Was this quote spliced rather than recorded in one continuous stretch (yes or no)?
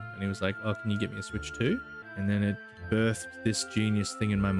yes